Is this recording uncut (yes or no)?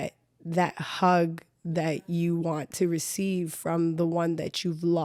yes